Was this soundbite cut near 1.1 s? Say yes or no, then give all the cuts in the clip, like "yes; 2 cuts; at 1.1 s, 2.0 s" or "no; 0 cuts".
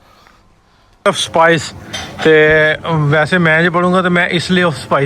yes; 1 cut; at 1.1 s